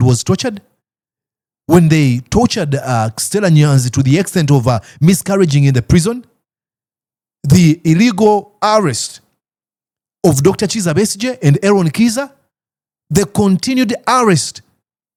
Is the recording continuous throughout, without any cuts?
yes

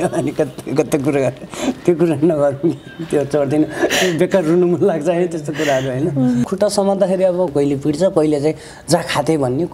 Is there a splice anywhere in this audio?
yes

